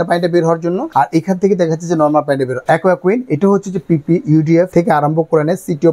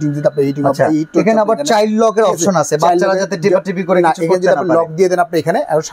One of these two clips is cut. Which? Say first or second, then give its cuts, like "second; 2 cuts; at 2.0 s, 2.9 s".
first; 3 cuts; at 0.8 s, 2.6 s, 4.7 s